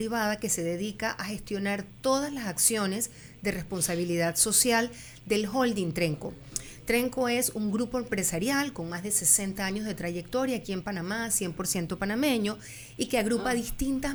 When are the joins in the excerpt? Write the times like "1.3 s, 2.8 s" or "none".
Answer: none